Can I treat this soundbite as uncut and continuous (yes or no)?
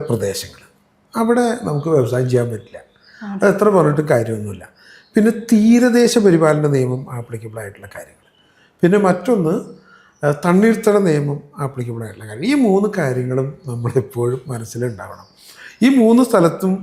yes